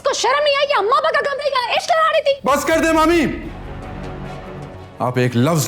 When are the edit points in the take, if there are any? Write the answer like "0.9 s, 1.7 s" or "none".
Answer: 4.7 s